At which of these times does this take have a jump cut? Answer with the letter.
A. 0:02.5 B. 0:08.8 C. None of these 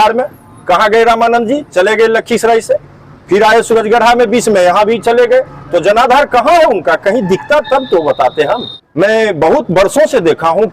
B